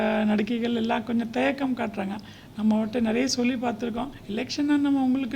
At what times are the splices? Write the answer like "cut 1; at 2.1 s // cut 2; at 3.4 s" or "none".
none